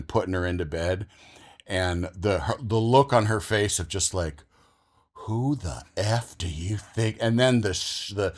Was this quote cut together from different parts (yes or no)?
no